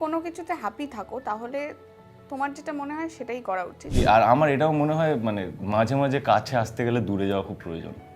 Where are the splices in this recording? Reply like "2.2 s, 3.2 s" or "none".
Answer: 3.9 s